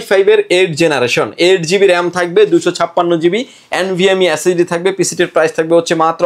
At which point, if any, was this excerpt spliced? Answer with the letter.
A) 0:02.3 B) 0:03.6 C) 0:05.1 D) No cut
D